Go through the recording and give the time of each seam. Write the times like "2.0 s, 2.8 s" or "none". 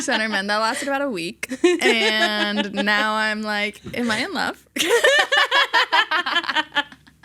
none